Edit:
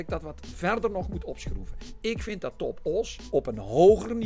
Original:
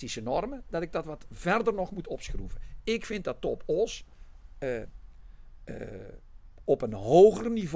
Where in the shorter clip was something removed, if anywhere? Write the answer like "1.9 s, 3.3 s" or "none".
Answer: 3.2 s